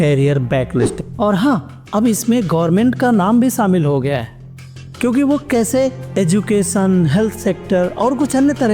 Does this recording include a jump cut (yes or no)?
yes